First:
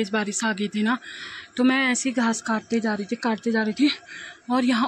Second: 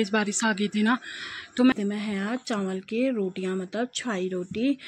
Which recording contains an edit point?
second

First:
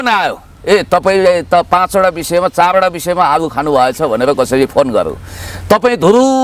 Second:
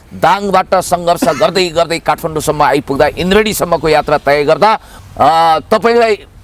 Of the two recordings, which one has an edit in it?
second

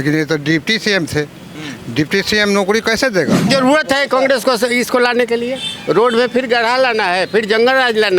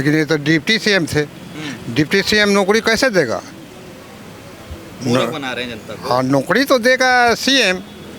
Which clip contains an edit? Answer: first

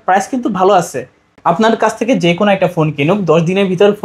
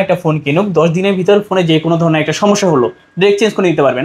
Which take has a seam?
first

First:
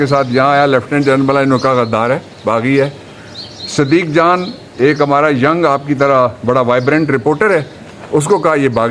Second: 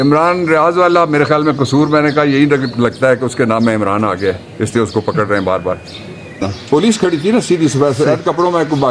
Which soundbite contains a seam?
second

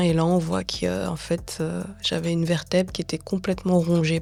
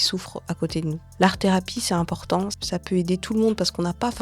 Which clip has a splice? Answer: second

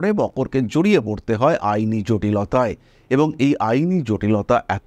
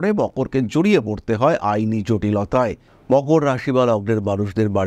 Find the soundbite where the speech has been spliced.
second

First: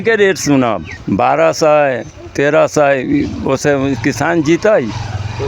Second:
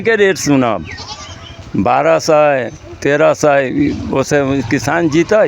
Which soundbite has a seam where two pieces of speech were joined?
first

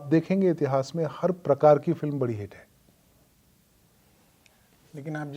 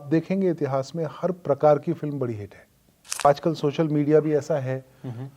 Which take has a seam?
second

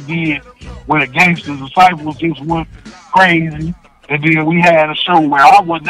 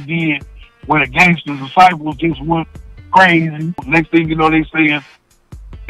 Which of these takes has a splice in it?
second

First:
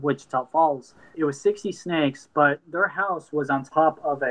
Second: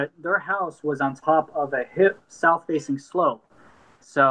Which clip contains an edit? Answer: first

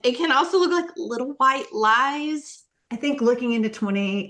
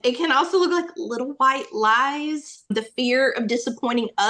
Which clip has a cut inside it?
first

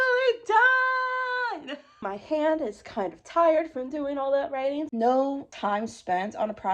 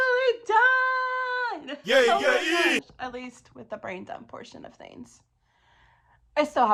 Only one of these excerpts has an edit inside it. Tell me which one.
first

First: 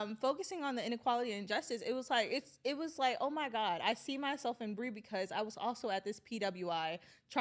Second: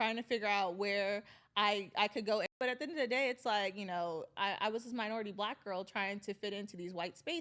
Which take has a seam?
second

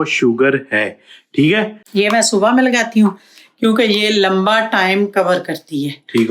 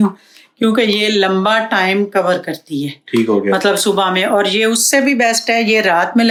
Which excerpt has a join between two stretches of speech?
first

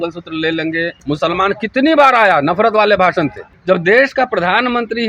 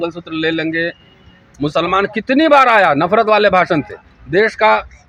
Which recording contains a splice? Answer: first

